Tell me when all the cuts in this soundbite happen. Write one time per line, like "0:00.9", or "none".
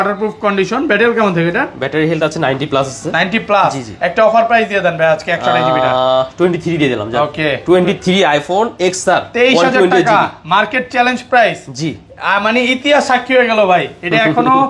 none